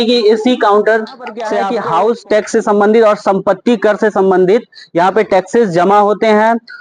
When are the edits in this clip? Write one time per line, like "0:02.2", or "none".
0:01.5